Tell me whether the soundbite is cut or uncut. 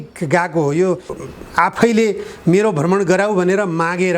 cut